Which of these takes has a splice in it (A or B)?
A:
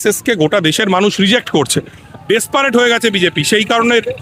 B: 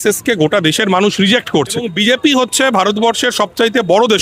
B